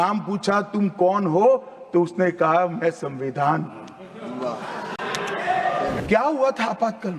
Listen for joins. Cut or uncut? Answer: cut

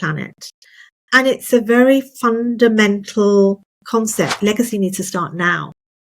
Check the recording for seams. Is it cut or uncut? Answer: cut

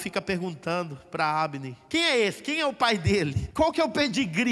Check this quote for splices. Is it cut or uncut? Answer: cut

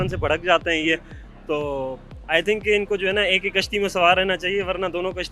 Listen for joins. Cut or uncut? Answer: uncut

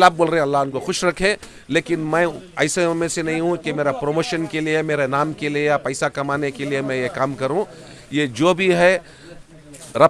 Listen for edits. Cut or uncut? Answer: uncut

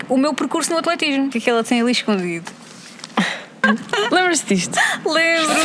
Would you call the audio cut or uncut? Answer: cut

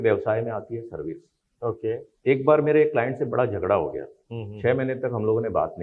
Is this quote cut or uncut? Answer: cut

